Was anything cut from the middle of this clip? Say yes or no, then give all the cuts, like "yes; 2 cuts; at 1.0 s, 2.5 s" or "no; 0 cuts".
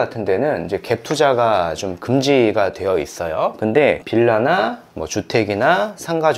yes; 1 cut; at 4.0 s